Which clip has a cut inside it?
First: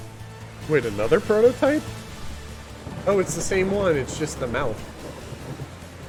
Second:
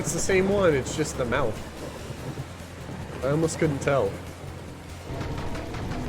second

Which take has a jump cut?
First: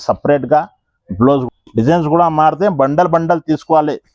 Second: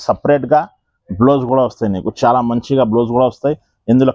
first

